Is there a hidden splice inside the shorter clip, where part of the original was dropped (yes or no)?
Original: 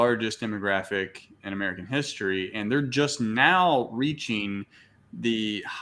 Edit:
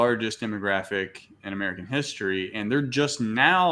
no